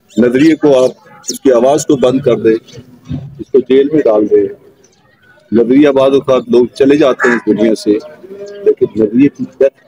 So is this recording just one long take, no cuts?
yes; 0 cuts

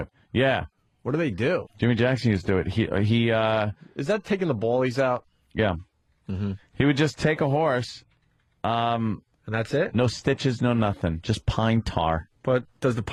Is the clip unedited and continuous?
yes; 0 cuts

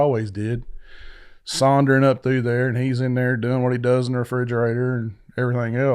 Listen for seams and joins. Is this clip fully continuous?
yes; 0 cuts

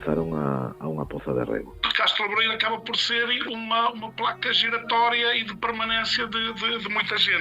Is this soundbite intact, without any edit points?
no; 1 cut; at 1.8 s

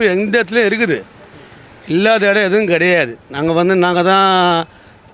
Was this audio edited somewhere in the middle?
no; 0 cuts

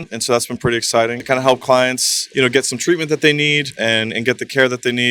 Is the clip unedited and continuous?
no; 1 cut; at 1.2 s

